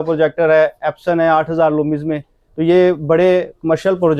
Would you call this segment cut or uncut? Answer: uncut